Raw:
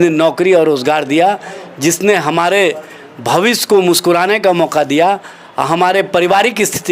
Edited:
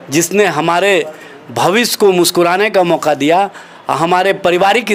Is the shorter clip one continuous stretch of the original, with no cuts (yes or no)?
yes